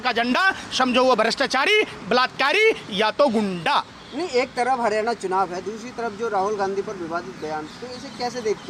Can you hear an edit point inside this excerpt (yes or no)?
no